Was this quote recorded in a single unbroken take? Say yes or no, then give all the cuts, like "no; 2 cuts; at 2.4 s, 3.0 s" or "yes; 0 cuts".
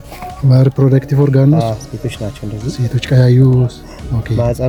yes; 0 cuts